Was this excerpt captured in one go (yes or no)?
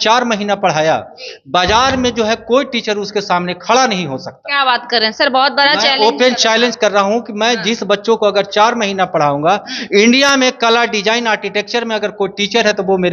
yes